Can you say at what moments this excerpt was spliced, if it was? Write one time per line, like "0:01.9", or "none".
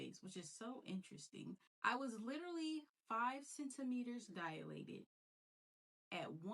0:01.7